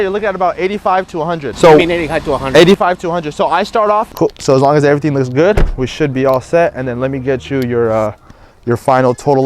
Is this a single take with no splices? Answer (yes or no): no